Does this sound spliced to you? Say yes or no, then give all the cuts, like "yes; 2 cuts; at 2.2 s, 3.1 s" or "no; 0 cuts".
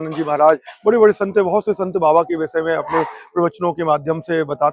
no; 0 cuts